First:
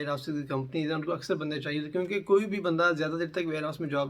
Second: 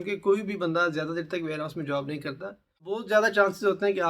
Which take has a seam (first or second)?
second